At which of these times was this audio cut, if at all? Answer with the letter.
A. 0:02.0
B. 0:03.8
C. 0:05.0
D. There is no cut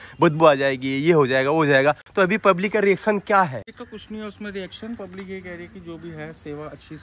B